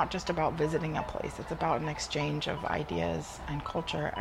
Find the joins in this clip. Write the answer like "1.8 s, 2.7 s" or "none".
none